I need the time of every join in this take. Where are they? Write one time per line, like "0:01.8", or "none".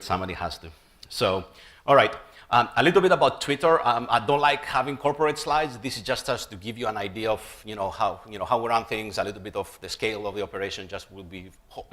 0:03.4